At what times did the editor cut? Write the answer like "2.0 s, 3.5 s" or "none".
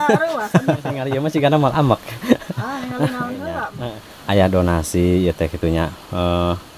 1.1 s, 3.7 s